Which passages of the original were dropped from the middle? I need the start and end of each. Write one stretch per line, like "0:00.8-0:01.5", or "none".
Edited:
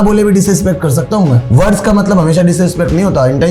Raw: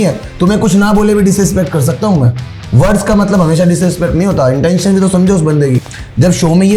0:02.3-0:02.6